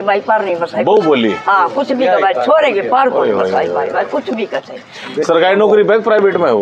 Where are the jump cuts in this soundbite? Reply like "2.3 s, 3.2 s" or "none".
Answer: 5.1 s